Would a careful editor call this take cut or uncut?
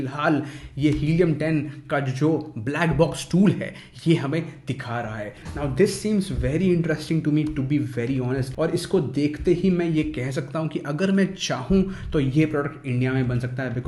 cut